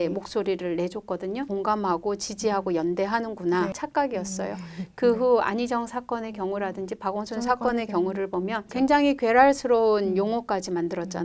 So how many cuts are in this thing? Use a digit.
3